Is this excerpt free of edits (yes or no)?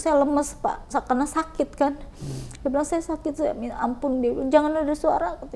yes